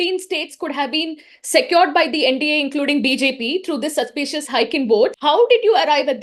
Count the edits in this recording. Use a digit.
1